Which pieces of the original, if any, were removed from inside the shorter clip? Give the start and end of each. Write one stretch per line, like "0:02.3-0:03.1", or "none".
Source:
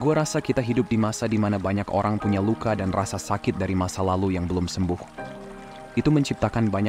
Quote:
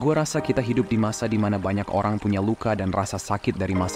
none